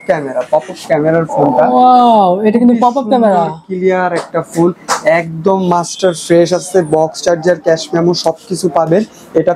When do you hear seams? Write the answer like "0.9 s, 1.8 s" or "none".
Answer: none

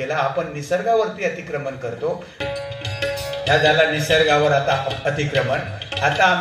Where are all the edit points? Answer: 2.3 s

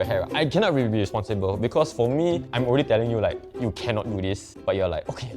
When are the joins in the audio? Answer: 2.5 s, 4.5 s

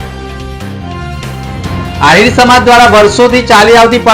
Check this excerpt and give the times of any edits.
1.8 s

